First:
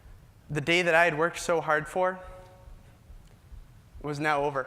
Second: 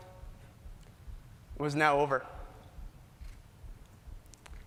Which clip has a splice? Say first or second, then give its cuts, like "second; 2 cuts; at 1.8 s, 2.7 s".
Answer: first; 1 cut; at 1.1 s